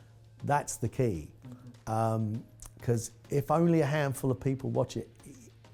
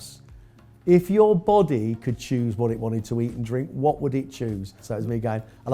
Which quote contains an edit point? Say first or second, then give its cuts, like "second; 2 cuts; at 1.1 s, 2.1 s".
second; 1 cut; at 4.8 s